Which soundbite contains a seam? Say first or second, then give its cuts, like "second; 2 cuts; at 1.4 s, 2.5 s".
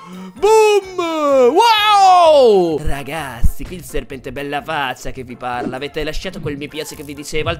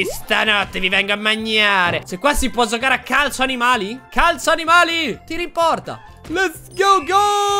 second; 2 cuts; at 2.0 s, 5.2 s